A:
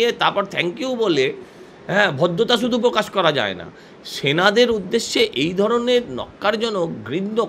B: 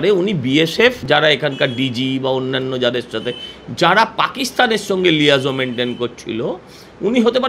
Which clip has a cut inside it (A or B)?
B